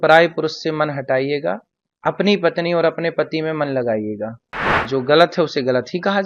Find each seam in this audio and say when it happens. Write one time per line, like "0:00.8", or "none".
0:04.8